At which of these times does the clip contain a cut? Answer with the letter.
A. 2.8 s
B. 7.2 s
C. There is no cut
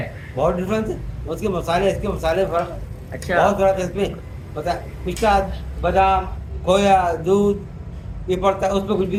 C